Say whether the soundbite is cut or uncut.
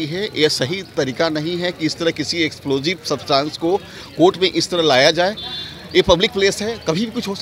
uncut